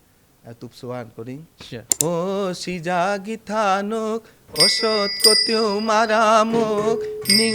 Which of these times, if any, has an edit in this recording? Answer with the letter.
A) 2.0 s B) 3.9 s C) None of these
A